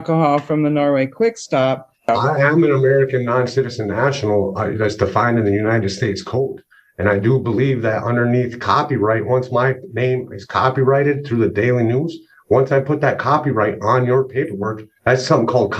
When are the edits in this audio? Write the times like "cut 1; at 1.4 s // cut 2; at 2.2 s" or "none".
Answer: cut 1; at 2.0 s